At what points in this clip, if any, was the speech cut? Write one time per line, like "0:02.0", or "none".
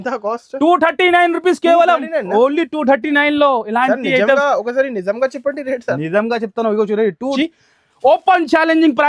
0:07.3